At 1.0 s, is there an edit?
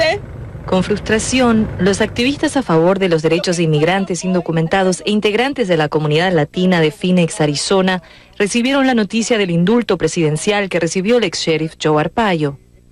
yes; 1 cut; at 1.0 s

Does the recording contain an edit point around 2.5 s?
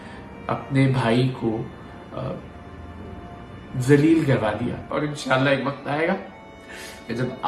no; 1 cut; at 4.8 s

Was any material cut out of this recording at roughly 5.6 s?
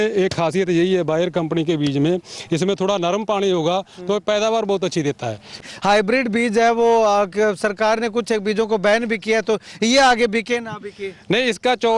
yes; 1 cut; at 5.6 s

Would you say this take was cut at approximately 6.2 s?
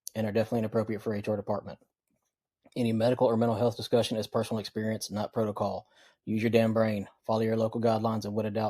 no; 0 cuts

